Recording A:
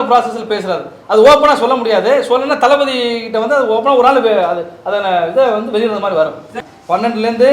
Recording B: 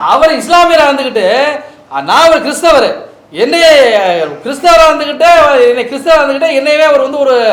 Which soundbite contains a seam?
A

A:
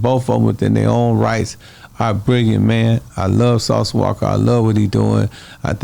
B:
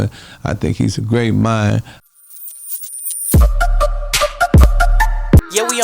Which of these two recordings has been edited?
B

